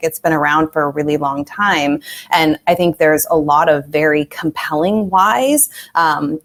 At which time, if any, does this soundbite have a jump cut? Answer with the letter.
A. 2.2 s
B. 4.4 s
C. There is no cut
C